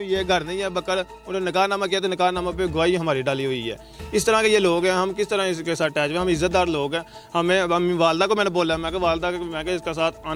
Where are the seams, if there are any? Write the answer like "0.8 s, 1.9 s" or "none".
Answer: none

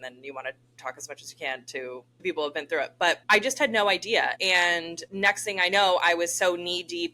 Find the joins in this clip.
0.8 s, 2.2 s, 3.2 s, 4.5 s

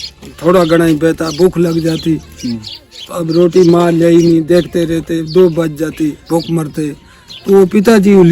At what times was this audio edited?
none

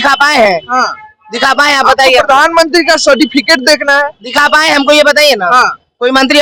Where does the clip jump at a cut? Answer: none

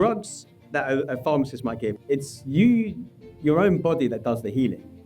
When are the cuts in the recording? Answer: 2.0 s

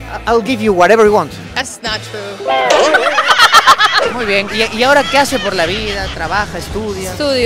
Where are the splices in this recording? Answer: 4.0 s

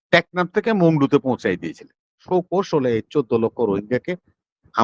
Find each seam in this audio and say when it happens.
2.2 s

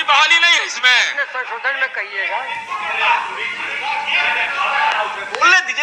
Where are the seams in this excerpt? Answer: none

